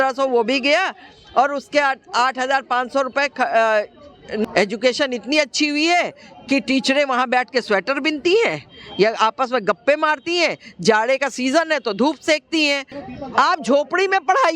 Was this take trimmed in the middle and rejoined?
yes; 2 cuts; at 4.4 s, 12.9 s

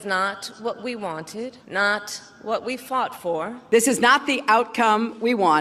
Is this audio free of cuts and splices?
no; 2 cuts; at 1.6 s, 3.6 s

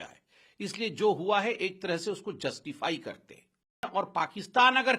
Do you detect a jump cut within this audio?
yes; 1 cut; at 3.9 s

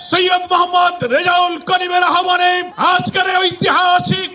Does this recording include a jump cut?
no; 0 cuts

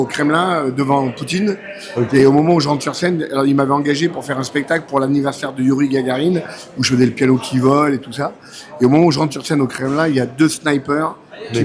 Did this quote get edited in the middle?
no; 0 cuts

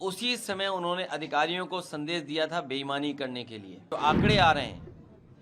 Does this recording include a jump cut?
yes; 1 cut; at 3.9 s

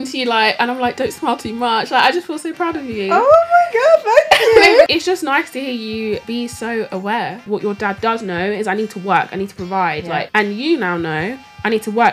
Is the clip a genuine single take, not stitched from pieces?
no; 4 cuts; at 4.9 s, 6.2 s, 7.4 s, 10.3 s

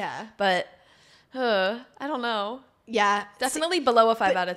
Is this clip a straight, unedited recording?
yes; 0 cuts

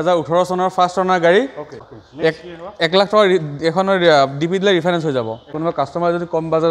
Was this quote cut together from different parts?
yes; 2 cuts; at 1.7 s, 5.5 s

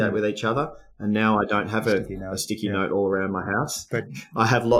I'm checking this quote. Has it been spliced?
no; 0 cuts

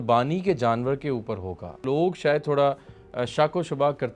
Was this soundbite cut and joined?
yes; 1 cut; at 1.8 s

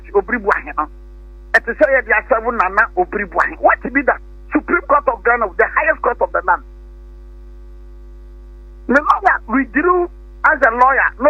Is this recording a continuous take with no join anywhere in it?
yes; 0 cuts

